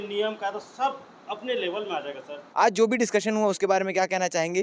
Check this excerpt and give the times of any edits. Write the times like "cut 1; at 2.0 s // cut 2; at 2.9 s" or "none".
cut 1; at 2.4 s